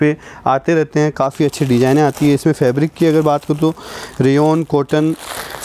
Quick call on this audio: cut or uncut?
uncut